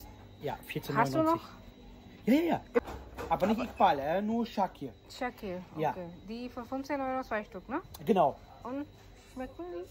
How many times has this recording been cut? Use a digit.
1